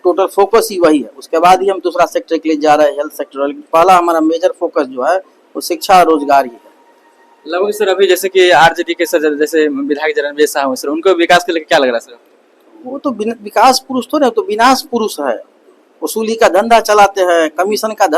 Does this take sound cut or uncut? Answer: uncut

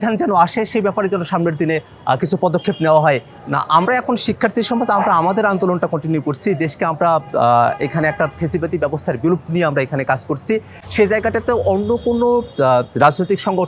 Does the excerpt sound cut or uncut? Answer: uncut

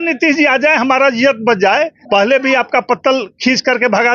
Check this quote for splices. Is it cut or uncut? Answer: cut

